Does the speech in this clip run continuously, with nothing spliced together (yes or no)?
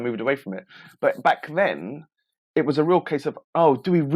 yes